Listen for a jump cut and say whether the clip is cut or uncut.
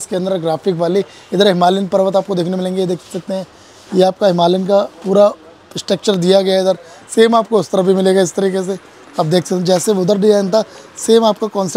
uncut